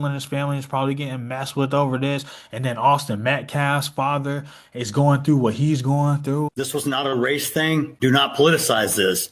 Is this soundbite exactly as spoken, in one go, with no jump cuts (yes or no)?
no